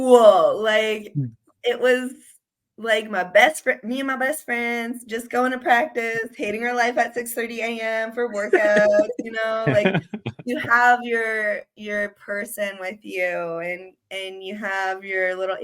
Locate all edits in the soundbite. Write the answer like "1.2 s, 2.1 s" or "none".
none